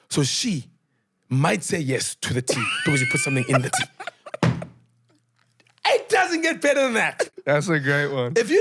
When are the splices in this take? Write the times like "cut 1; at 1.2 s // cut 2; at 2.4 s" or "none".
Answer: cut 1; at 7.2 s